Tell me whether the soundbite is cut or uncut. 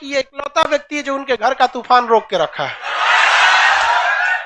uncut